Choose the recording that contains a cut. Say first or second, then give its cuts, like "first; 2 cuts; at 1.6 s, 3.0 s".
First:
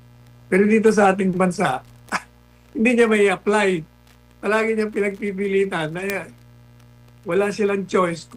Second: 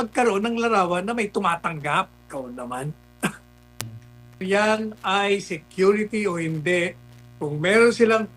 second; 1 cut; at 4.4 s